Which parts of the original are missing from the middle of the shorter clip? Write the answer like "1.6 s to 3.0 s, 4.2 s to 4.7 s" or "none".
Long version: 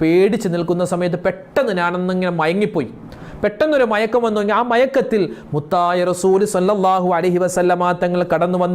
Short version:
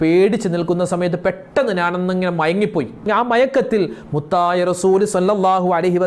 3.0 s to 4.4 s